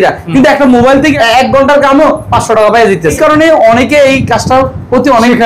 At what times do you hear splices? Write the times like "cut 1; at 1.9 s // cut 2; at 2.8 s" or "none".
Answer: cut 1; at 1.1 s // cut 2; at 3.2 s